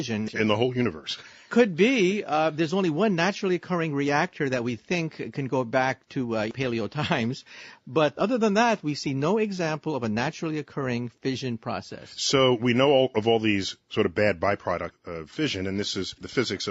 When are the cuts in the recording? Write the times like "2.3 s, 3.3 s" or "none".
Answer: none